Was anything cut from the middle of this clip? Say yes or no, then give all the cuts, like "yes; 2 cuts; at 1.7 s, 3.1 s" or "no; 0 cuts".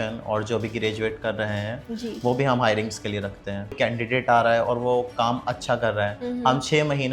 yes; 1 cut; at 3.7 s